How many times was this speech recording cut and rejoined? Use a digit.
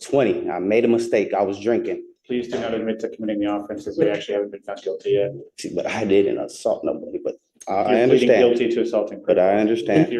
2